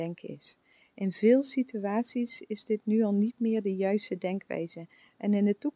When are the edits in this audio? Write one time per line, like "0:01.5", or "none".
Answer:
none